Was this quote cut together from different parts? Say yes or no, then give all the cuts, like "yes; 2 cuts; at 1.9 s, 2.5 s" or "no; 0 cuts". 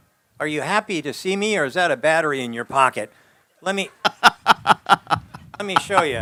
no; 0 cuts